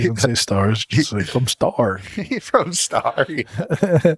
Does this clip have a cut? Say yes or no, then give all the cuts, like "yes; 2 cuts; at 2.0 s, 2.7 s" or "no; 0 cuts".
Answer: no; 0 cuts